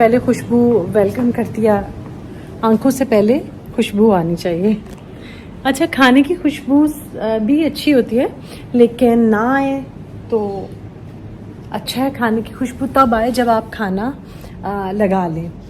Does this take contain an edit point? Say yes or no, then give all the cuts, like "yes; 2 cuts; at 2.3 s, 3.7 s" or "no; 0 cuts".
no; 0 cuts